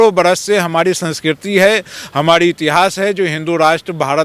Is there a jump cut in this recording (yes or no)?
no